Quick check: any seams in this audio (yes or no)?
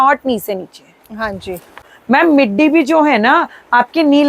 yes